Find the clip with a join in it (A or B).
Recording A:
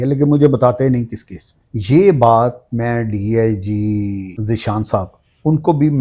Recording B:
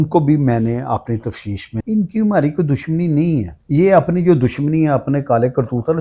B